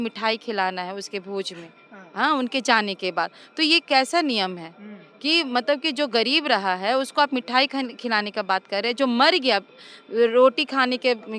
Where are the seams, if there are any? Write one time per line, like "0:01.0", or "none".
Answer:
none

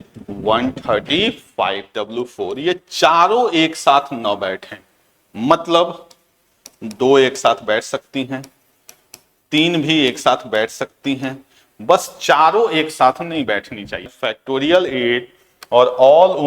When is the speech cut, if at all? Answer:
0:01.9
0:14.1

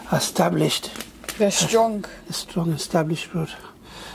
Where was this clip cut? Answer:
none

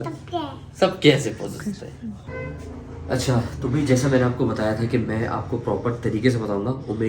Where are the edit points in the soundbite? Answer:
0:02.3

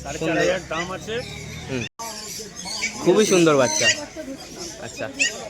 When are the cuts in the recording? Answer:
0:01.9

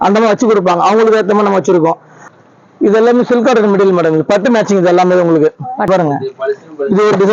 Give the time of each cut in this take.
0:02.3
0:05.9

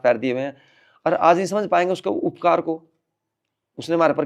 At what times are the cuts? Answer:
none

